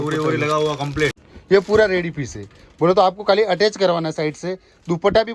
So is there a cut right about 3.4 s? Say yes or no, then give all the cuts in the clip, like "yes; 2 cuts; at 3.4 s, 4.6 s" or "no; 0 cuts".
no; 1 cut; at 1.2 s